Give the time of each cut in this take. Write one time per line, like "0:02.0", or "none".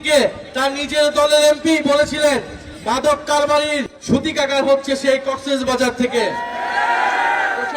0:03.9